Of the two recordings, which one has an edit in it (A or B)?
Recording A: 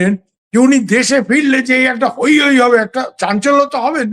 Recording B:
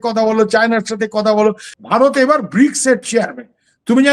B